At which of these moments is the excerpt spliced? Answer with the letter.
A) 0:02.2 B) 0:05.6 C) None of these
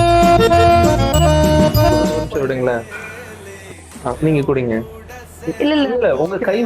A